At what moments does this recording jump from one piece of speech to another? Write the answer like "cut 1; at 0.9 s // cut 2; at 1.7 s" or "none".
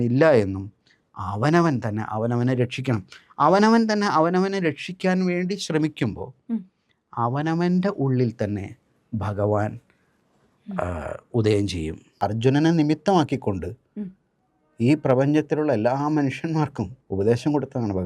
cut 1; at 12.0 s // cut 2; at 17.0 s